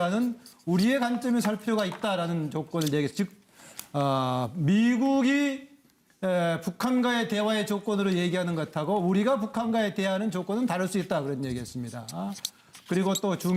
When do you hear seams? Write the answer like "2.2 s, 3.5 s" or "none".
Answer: none